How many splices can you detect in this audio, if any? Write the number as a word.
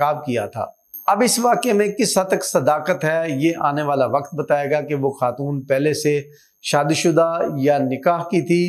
zero